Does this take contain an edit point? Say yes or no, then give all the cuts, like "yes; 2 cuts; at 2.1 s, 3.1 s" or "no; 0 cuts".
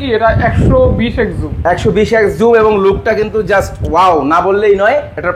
no; 0 cuts